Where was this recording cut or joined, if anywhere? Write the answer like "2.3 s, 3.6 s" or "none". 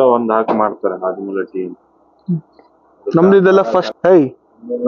3.9 s